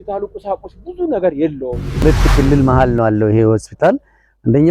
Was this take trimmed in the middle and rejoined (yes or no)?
yes